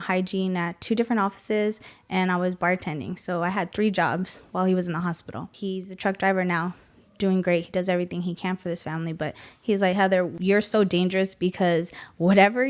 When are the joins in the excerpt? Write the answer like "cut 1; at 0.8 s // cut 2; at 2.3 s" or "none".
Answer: cut 1; at 5.5 s // cut 2; at 10.3 s

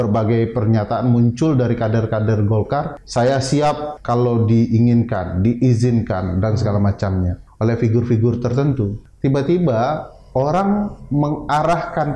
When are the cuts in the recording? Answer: cut 1; at 3.0 s // cut 2; at 3.9 s // cut 3; at 7.4 s // cut 4; at 9.0 s

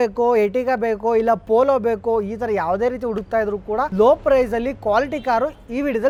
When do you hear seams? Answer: none

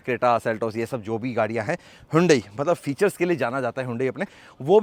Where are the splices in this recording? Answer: none

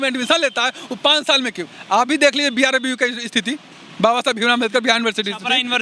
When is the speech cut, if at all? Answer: none

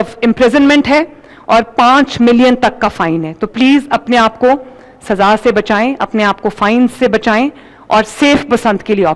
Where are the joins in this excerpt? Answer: none

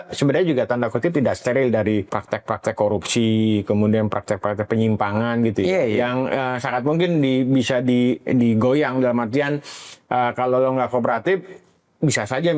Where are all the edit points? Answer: cut 1; at 2.2 s

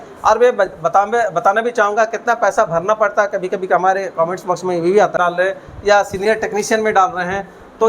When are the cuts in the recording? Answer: cut 1; at 5.1 s

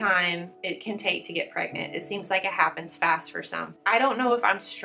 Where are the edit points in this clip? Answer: cut 1; at 3.8 s

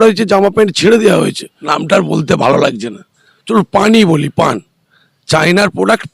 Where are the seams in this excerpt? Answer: cut 1; at 1.4 s

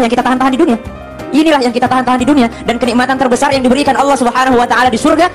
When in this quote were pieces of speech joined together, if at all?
none

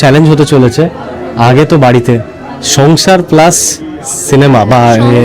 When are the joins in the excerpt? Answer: none

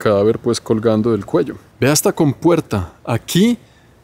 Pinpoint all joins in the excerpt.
cut 1; at 1.6 s

